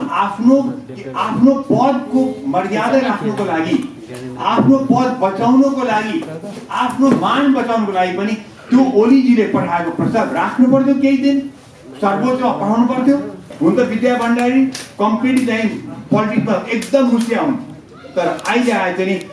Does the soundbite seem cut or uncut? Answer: cut